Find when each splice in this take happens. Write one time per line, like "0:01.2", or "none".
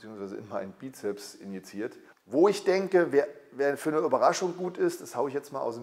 0:02.1